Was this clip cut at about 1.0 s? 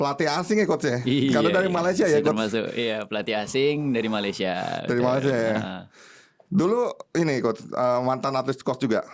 no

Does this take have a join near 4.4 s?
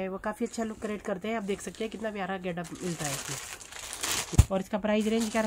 yes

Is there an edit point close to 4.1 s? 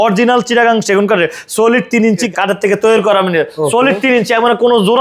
no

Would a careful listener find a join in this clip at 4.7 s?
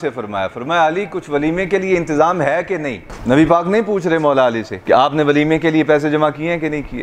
yes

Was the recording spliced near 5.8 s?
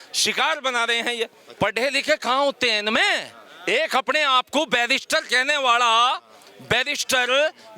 no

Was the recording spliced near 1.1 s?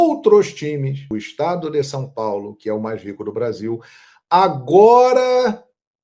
yes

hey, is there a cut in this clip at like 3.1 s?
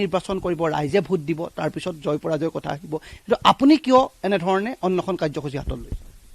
no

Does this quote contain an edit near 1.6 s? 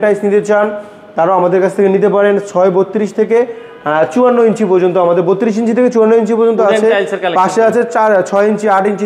no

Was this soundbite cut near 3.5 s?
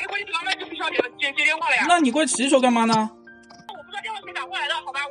no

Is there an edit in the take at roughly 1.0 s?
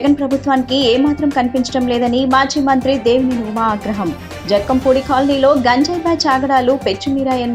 no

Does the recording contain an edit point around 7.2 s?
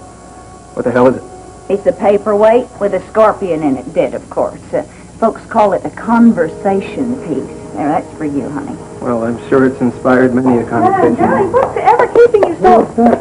yes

